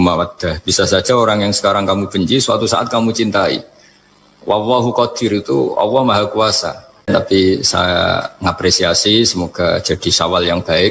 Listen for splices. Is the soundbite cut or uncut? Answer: cut